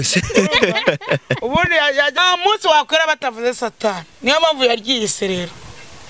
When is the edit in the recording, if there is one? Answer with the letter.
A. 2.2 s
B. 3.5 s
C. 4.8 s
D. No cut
A